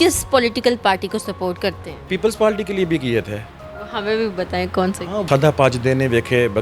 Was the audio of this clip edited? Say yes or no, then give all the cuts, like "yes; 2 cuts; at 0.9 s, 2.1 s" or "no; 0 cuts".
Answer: yes; 2 cuts; at 2.1 s, 5.3 s